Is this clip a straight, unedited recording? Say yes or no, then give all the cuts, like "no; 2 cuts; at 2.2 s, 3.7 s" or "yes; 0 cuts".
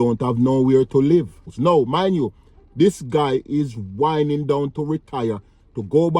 no; 1 cut; at 1.5 s